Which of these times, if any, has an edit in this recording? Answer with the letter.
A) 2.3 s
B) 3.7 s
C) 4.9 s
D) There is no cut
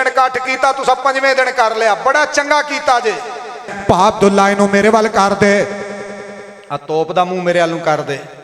B